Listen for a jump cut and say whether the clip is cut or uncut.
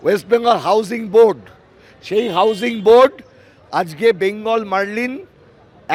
uncut